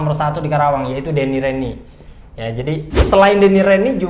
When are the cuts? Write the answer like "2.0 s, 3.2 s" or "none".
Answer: 2.9 s